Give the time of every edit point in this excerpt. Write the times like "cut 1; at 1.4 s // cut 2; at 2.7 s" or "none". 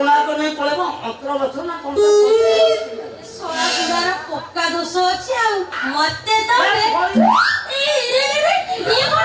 cut 1; at 5.7 s